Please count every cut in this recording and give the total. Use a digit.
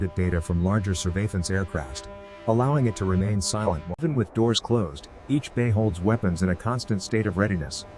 1